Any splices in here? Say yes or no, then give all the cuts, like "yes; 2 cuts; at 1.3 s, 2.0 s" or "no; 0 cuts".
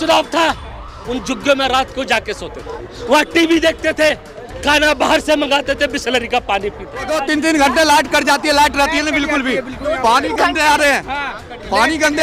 yes; 1 cut; at 7.1 s